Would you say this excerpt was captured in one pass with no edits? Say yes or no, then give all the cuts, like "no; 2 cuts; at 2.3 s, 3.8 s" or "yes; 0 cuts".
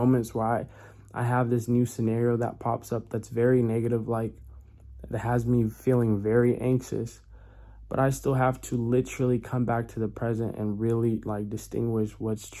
yes; 0 cuts